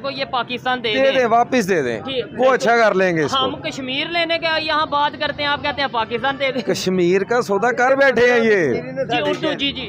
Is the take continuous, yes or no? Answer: yes